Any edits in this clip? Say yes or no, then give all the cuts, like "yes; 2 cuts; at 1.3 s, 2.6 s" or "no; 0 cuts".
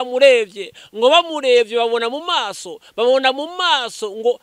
no; 0 cuts